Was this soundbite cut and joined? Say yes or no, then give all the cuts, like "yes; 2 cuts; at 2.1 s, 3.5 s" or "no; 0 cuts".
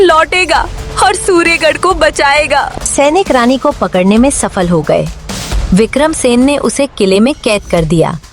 no; 0 cuts